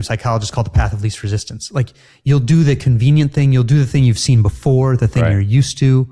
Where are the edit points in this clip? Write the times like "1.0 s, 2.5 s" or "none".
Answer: none